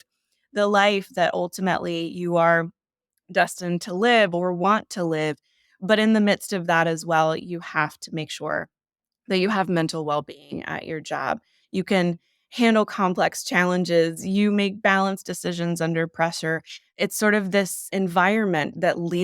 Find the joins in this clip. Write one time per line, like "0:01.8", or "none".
0:17.9